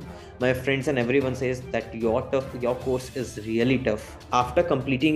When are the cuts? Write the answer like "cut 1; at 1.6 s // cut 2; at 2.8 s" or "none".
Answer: cut 1; at 4.1 s

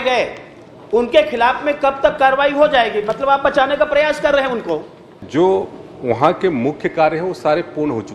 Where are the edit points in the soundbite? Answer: cut 1; at 5.2 s

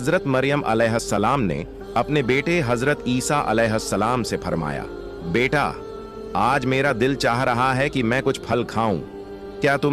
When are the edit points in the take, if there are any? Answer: none

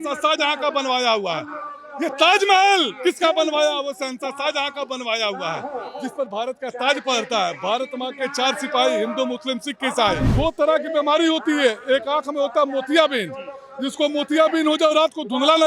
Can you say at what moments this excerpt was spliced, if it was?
cut 1; at 10.3 s

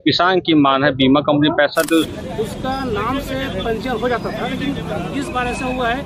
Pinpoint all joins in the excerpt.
cut 1; at 2.1 s

